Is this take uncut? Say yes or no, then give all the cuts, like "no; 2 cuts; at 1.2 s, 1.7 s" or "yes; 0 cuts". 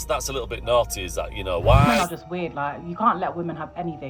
no; 1 cut; at 1.8 s